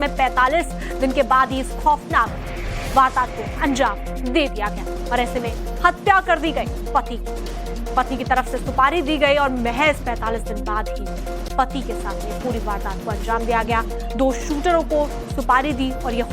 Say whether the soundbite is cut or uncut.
cut